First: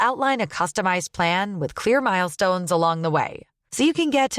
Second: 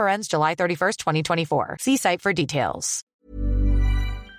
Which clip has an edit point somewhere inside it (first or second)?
second